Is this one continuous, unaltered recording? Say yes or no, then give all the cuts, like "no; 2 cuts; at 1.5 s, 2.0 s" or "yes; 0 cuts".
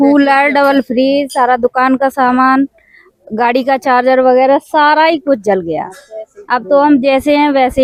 yes; 0 cuts